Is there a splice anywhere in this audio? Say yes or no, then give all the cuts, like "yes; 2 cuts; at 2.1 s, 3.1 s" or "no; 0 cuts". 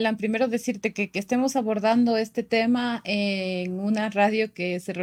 no; 0 cuts